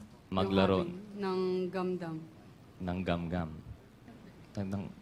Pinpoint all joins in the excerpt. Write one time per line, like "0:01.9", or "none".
none